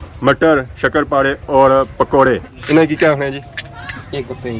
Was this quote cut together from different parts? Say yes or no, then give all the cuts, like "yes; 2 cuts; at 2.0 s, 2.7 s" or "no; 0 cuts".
yes; 1 cut; at 2.4 s